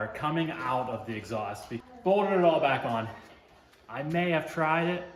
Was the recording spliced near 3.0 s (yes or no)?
no